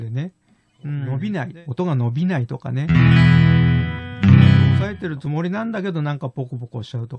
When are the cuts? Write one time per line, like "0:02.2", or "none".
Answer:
0:01.1
0:04.9